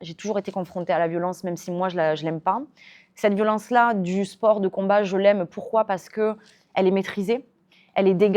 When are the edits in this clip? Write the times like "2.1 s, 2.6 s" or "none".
none